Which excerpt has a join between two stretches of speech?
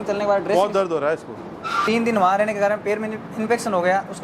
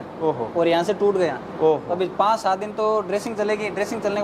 first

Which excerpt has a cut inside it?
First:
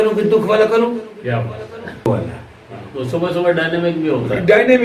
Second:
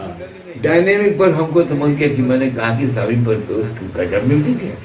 first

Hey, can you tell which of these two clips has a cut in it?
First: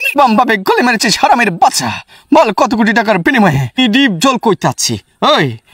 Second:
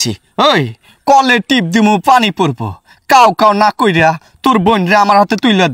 first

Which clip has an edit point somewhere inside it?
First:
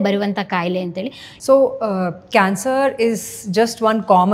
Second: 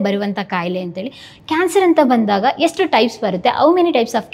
first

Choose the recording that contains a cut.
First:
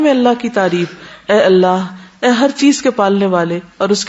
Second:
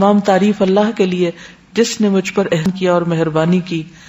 second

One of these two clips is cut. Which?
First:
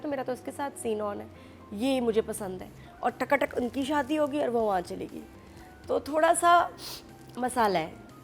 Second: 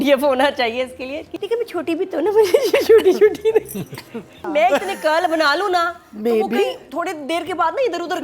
second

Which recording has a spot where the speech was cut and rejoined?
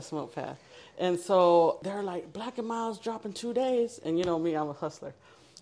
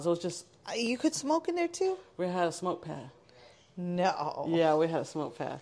first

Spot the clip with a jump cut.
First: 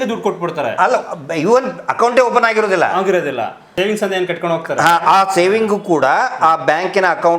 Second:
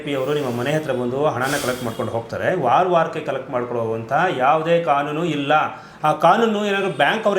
first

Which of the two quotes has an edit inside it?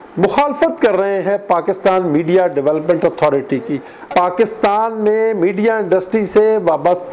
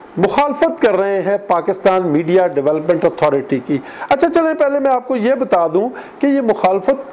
first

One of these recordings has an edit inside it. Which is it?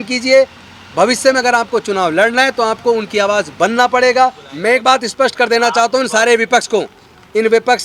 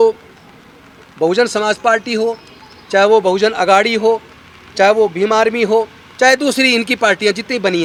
first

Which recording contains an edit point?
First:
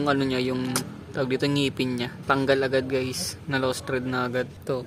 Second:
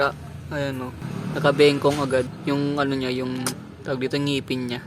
second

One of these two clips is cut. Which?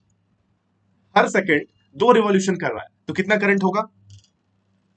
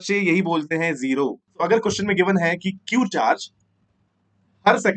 second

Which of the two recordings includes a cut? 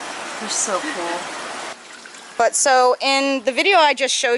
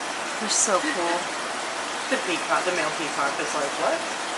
first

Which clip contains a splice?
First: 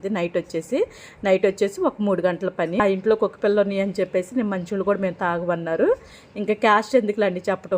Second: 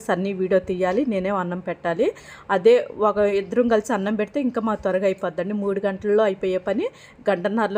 first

